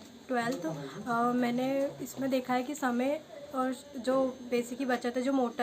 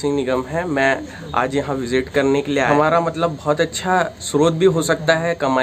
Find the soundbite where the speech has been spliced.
second; 1 cut; at 2.7 s

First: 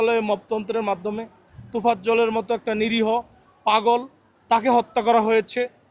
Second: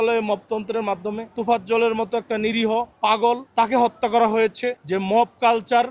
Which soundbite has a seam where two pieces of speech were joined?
second; 3 cuts; at 1.3 s, 3.2 s, 4.8 s

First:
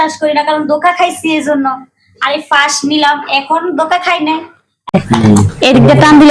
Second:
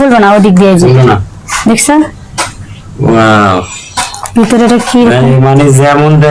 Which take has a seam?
first; 1 cut; at 4.9 s

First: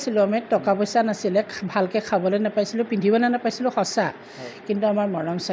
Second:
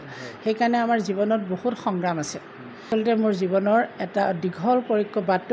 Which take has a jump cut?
second; 1 cut; at 2.9 s

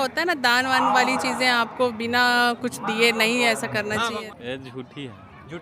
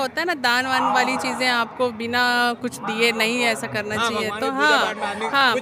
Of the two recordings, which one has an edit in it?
first; 1 cut; at 4.1 s

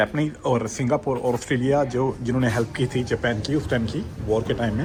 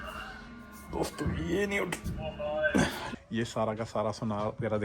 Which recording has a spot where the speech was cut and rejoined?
second; 1 cut; at 3.0 s

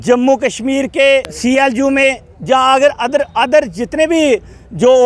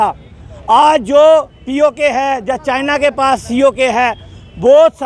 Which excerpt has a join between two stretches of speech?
first; 1 cut; at 1.3 s

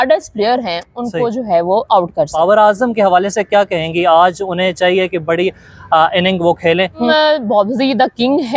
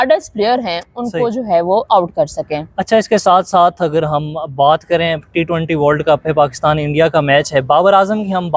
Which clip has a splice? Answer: first; 2 cuts; at 2.3 s, 7.0 s

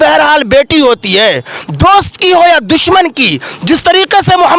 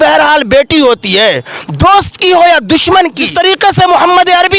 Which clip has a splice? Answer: second; 1 cut; at 3.2 s

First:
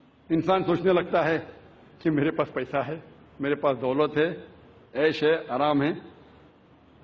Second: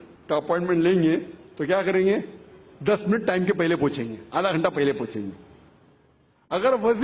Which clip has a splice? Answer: second; 1 cut; at 4.2 s

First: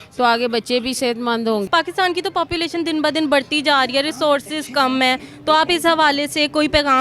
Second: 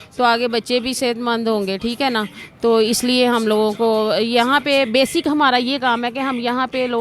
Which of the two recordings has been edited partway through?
first; 1 cut; at 1.7 s

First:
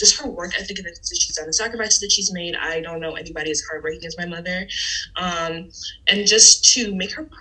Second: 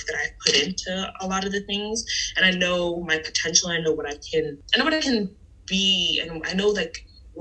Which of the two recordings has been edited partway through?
second; 1 cut; at 4.6 s

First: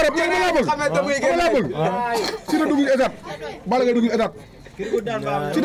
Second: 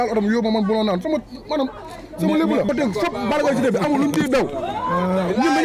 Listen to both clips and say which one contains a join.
second; 1 cut; at 2.7 s

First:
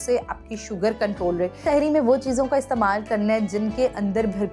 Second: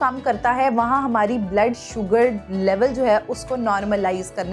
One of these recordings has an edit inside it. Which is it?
first; 1 cut; at 1.6 s

